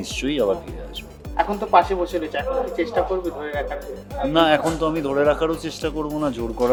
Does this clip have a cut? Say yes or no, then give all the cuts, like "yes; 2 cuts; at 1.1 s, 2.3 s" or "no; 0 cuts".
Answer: no; 0 cuts